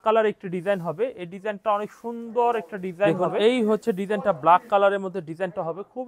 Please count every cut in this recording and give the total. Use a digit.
1